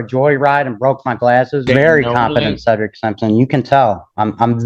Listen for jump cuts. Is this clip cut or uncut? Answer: cut